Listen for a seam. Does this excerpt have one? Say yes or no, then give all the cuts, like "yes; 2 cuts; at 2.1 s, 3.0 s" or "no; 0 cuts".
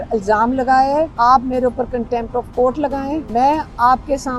yes; 2 cuts; at 1.1 s, 3.3 s